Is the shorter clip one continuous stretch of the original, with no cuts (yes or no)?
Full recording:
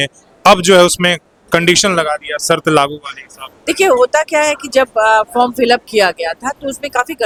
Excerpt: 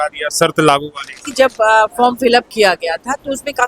no